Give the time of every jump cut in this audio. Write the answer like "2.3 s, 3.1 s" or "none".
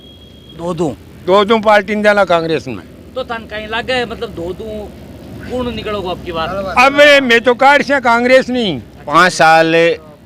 8.9 s